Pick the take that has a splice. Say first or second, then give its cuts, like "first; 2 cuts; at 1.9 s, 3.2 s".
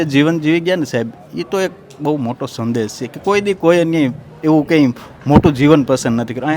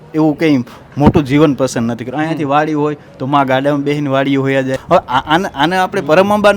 second; 1 cut; at 4.8 s